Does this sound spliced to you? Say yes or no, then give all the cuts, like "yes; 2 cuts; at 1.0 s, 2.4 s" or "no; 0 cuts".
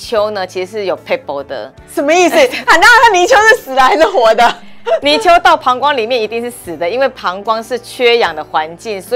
no; 0 cuts